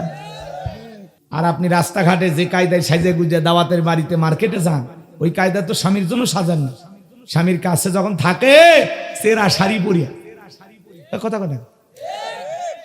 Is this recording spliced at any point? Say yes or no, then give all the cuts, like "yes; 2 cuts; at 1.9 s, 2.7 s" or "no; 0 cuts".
yes; 1 cut; at 1.1 s